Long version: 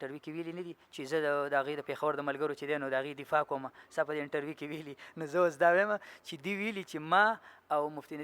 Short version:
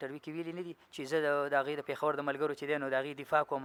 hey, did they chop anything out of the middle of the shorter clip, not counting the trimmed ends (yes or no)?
no